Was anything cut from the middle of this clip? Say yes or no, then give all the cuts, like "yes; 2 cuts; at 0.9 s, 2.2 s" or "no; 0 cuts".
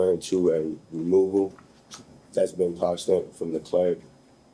no; 0 cuts